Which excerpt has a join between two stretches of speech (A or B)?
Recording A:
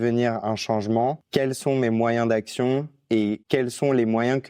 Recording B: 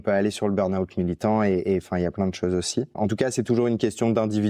A